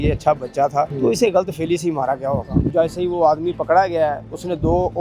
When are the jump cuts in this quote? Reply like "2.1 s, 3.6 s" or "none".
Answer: 0.9 s, 2.7 s